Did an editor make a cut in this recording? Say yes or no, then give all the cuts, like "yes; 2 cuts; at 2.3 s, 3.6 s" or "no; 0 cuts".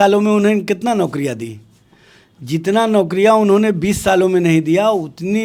no; 0 cuts